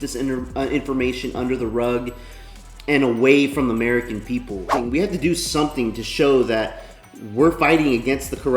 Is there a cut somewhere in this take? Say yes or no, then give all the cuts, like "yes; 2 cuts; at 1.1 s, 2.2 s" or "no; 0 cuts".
yes; 1 cut; at 4.7 s